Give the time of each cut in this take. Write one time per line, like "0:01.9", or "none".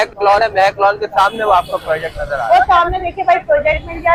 none